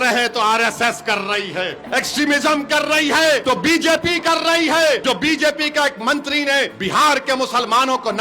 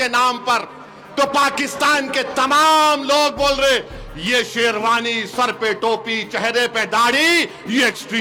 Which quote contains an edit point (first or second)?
first